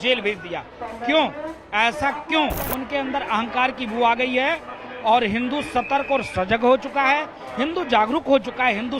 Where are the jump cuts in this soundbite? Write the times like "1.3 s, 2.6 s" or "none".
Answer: 2.6 s